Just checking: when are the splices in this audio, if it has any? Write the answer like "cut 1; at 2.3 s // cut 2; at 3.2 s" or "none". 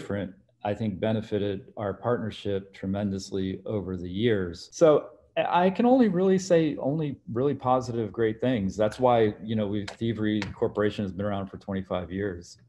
cut 1; at 4.6 s